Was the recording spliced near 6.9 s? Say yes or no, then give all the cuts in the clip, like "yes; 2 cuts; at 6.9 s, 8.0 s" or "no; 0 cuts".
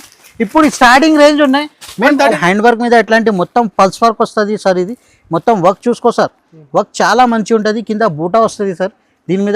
no; 1 cut; at 2.4 s